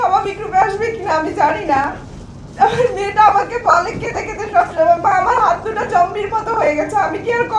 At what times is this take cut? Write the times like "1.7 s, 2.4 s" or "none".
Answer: 2.4 s